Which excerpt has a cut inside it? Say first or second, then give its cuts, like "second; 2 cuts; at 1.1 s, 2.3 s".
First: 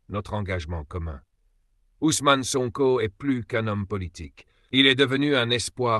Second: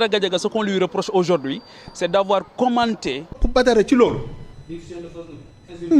second; 1 cut; at 3.4 s